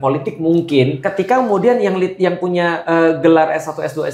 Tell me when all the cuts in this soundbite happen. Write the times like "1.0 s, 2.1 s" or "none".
1.0 s, 2.8 s